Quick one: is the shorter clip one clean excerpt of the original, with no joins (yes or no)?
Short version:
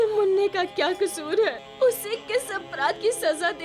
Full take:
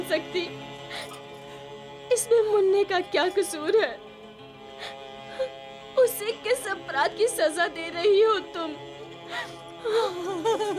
no